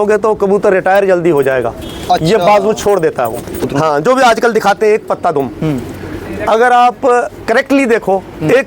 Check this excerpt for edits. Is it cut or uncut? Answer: cut